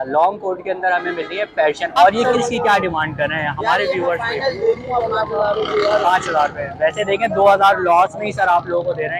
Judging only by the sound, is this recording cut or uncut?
cut